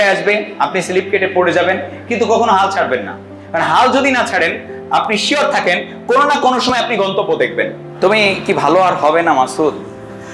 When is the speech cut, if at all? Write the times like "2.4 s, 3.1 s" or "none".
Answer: 7.8 s

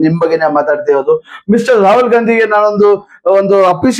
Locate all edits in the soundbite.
none

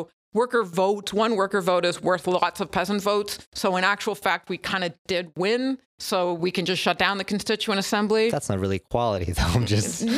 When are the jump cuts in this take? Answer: none

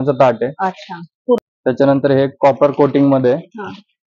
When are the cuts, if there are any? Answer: none

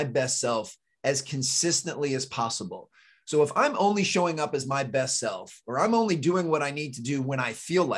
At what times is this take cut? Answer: none

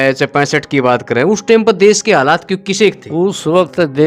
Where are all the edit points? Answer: 3.0 s

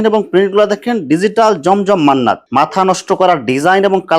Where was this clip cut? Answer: 2.4 s

